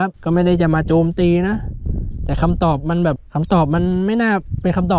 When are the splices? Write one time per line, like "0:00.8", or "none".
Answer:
0:03.2

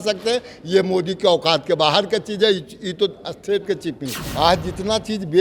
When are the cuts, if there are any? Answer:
0:04.1

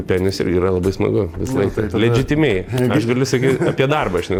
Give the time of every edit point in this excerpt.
none

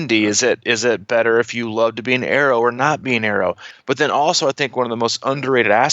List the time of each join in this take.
0:03.7

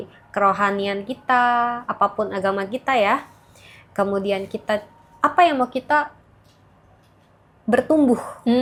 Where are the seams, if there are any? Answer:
none

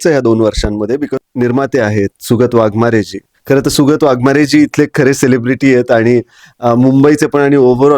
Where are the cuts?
0:01.3

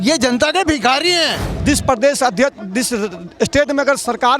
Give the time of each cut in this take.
0:01.5

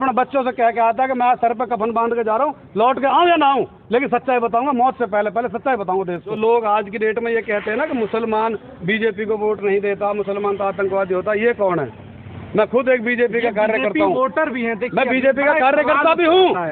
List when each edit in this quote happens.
0:06.3

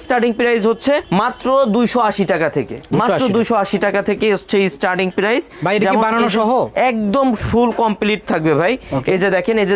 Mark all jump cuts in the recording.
none

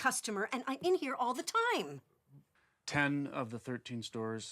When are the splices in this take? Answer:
0:02.5

